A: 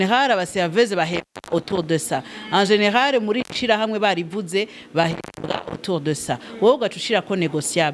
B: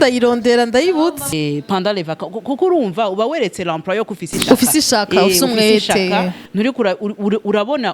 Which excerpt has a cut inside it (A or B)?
B